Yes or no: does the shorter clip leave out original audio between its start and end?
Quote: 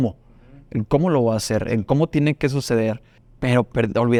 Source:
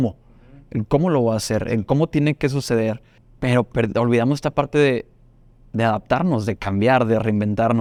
no